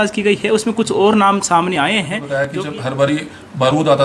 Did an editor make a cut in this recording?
yes; 1 cut; at 2.2 s

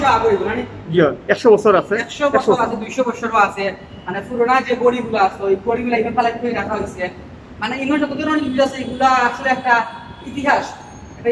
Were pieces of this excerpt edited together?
no; 0 cuts

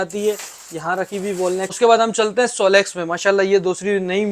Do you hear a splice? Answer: yes; 1 cut; at 1.8 s

